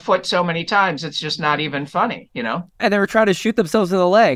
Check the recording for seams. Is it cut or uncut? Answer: uncut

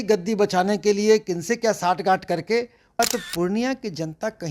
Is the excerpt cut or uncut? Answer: cut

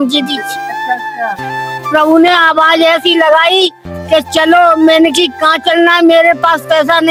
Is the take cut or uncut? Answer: uncut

